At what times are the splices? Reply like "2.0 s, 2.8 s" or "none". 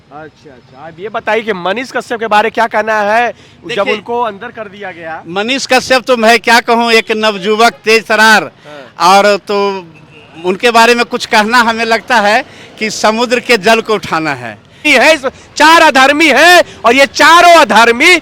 14.9 s